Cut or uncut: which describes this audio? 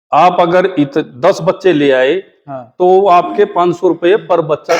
uncut